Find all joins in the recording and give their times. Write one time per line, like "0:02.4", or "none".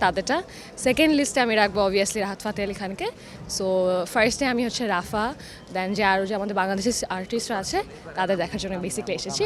none